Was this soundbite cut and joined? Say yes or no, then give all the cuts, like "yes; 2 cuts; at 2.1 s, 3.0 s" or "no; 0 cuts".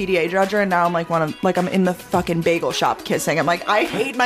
no; 0 cuts